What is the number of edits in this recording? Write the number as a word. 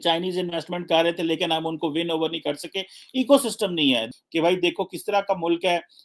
one